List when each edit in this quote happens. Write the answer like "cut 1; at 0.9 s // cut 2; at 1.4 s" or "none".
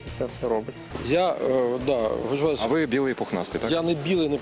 cut 1; at 0.9 s